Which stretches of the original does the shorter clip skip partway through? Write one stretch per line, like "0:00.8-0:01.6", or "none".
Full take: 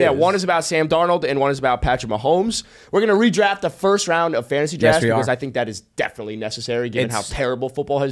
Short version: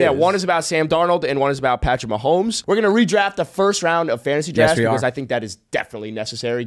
0:02.6-0:02.8